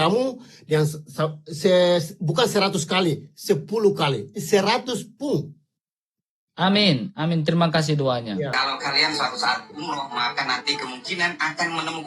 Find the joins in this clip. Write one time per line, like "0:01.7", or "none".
0:08.5